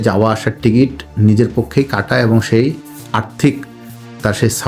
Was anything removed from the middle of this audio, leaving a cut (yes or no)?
no